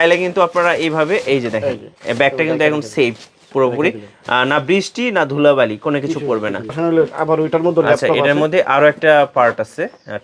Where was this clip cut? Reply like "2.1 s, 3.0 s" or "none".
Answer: 6.8 s